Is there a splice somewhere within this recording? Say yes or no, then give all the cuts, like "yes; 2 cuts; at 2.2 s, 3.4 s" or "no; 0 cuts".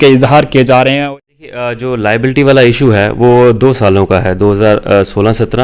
yes; 1 cut; at 1.0 s